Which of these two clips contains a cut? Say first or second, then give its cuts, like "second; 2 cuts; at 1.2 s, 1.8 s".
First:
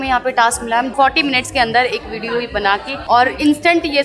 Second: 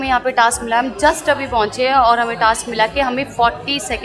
first; 2 cuts; at 0.9 s, 3.0 s